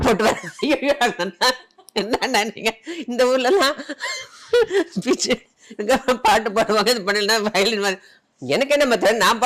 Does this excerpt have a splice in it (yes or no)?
no